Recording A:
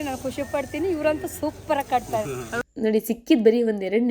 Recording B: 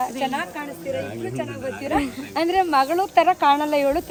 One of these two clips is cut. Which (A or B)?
A